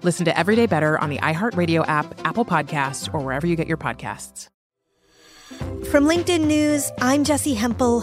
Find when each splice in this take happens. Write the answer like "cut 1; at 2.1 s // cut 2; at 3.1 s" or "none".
cut 1; at 4.5 s